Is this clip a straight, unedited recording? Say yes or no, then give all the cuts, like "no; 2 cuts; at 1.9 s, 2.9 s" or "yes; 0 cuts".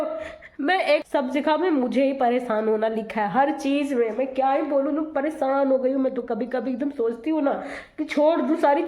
no; 1 cut; at 1.0 s